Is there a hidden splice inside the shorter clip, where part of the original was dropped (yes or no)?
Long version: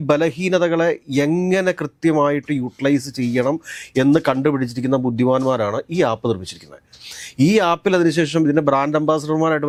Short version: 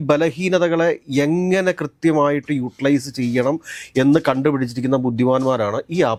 no